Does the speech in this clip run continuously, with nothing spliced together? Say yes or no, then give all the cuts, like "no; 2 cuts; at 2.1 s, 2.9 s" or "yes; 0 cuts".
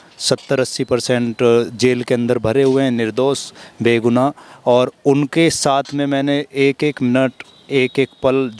yes; 0 cuts